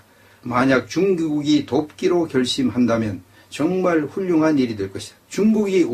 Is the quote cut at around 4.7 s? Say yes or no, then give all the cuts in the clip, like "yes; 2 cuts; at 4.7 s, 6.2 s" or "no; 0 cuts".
yes; 1 cut; at 4.7 s